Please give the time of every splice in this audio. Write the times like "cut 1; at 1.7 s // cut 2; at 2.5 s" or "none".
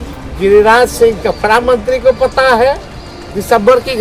none